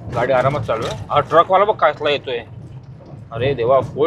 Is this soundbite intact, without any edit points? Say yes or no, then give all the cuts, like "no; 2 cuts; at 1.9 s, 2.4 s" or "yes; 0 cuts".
yes; 0 cuts